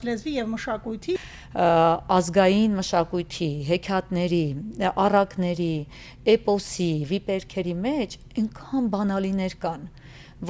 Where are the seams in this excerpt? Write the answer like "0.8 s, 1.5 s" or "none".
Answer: 1.1 s